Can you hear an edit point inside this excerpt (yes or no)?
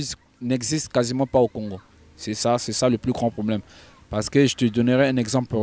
no